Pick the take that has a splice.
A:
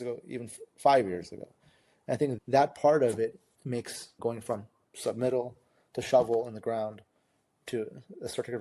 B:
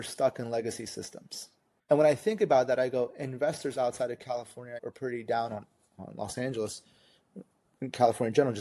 A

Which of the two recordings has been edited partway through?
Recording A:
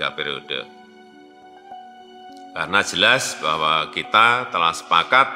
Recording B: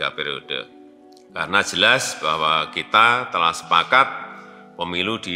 B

